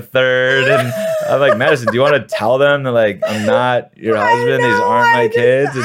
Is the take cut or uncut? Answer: uncut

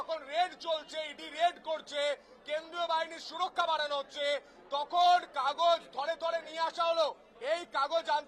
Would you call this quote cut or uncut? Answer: uncut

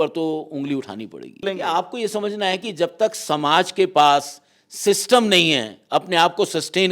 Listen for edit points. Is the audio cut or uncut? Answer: cut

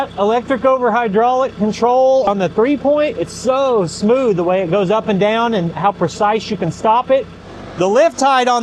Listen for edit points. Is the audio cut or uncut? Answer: cut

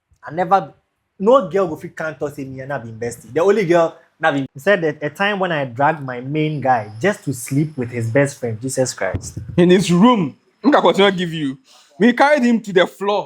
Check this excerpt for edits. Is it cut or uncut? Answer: cut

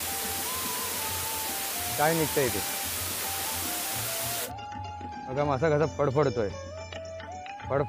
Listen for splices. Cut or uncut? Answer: cut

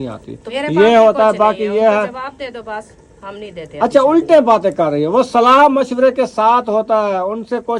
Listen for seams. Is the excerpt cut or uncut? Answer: uncut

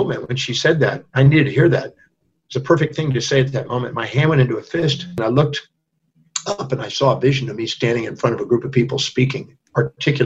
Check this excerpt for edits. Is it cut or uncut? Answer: cut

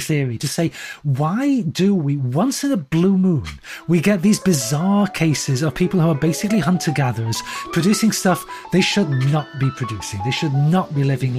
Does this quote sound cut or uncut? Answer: uncut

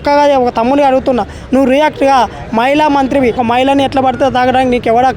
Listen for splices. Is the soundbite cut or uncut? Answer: cut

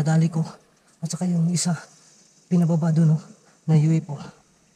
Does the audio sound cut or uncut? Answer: uncut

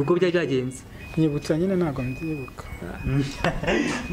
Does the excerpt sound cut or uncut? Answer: uncut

